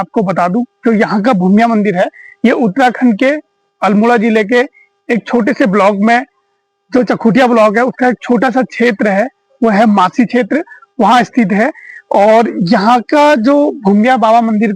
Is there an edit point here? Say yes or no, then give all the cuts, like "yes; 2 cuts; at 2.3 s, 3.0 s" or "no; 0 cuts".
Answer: no; 0 cuts